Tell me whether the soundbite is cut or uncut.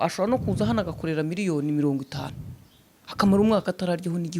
uncut